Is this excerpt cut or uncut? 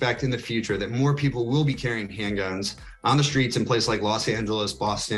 uncut